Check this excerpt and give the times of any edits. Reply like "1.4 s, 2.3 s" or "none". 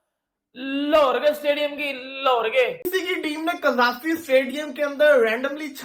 2.9 s